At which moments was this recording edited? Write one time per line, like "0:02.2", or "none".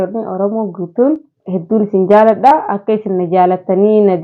0:01.3